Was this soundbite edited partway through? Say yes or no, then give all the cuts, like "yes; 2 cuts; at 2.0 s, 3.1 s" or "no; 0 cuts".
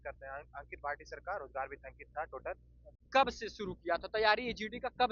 yes; 1 cut; at 3.0 s